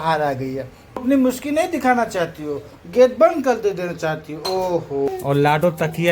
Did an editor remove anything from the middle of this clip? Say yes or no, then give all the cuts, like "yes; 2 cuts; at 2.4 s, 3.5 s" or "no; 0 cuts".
yes; 2 cuts; at 1.0 s, 5.1 s